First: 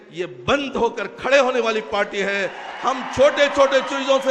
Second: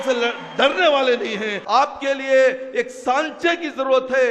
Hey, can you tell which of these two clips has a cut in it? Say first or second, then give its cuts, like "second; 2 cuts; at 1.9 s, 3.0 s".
second; 1 cut; at 1.6 s